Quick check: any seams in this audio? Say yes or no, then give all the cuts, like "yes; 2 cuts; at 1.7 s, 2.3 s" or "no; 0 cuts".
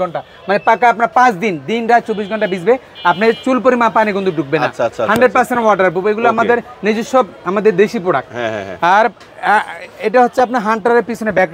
no; 0 cuts